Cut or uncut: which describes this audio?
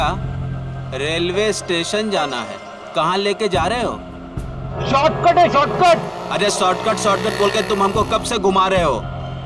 uncut